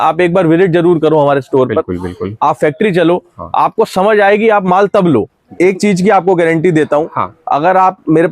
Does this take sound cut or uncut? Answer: cut